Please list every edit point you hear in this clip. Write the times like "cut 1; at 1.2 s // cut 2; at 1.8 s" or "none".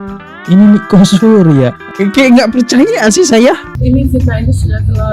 cut 1; at 3.7 s